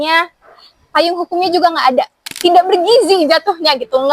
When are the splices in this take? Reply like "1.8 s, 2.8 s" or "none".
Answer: 2.2 s